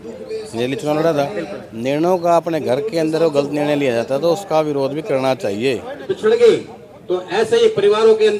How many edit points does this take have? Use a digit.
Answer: 1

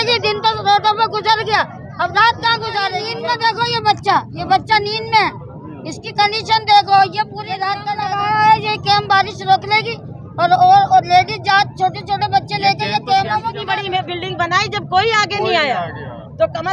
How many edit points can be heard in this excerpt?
3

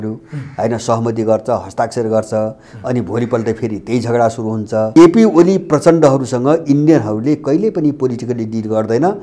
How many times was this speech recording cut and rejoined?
1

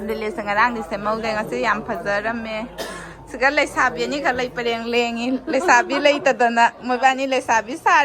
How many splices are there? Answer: 0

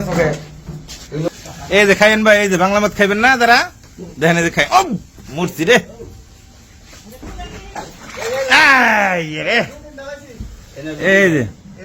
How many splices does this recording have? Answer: 2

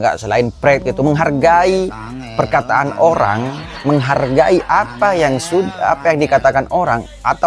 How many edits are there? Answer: 0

